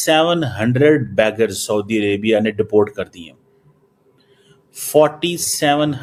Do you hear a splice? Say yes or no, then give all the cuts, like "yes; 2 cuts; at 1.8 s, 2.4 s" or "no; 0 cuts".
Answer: no; 0 cuts